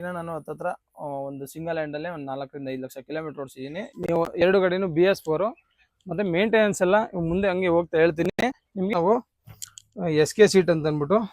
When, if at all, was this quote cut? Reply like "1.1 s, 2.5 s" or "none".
3.9 s, 8.9 s